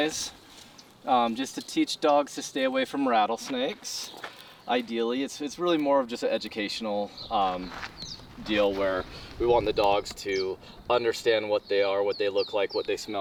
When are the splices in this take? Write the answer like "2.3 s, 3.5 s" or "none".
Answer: none